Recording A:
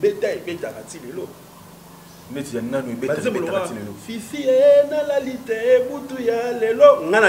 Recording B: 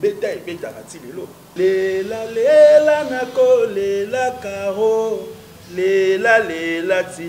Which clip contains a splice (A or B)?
B